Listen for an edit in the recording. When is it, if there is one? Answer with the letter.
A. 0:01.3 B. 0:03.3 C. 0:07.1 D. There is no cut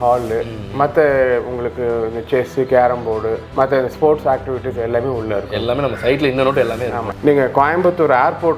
C